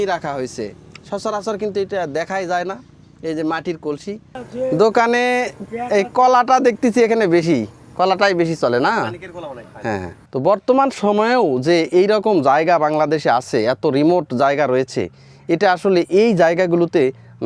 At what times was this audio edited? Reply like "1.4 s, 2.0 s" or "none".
4.4 s, 10.2 s